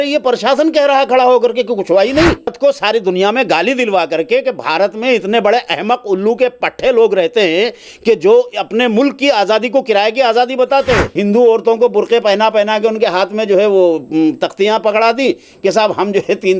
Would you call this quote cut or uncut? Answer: cut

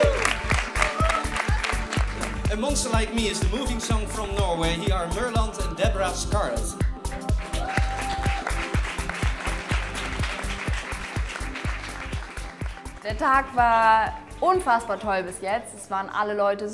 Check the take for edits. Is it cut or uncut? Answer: cut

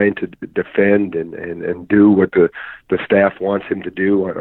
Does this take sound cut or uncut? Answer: uncut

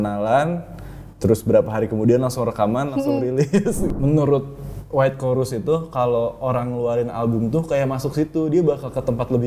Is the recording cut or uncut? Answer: cut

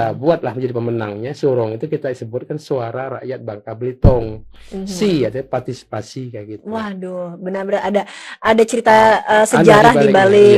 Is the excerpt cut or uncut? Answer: uncut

